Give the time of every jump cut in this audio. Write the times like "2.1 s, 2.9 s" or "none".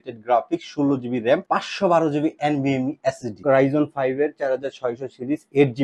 1.4 s, 3.4 s